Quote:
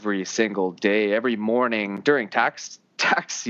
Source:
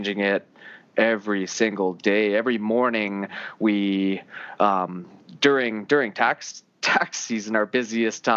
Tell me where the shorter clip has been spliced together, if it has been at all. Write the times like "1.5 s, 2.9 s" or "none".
2.0 s